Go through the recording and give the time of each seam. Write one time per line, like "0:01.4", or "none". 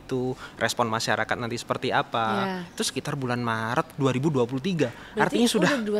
none

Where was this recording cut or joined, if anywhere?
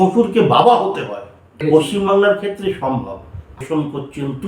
0:01.6
0:03.6

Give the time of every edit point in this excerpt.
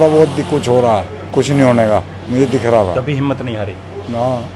0:01.2

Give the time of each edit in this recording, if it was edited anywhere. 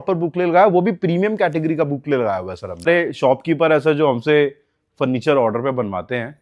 0:02.9

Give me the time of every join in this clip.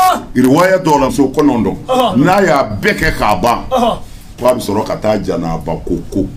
0:01.1

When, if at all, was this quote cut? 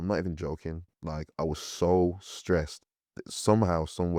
none

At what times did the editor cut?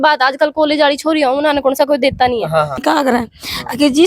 0:02.8

